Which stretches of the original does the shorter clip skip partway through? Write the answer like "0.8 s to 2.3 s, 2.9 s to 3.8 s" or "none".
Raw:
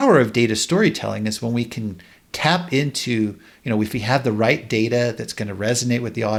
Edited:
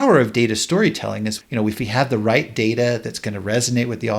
1.4 s to 3.5 s